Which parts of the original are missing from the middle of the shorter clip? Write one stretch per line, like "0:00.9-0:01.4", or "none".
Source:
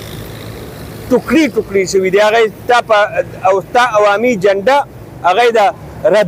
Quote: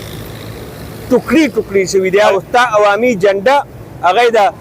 0:02.3-0:03.5